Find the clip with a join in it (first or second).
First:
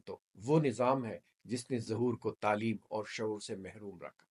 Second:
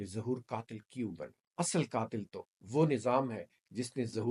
second